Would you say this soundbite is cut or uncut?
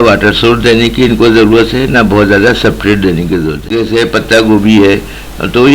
cut